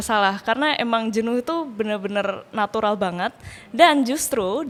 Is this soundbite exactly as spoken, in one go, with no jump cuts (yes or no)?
yes